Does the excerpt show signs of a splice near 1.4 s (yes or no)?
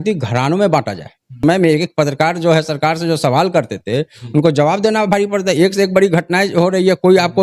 yes